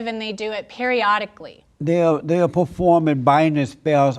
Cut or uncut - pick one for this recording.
uncut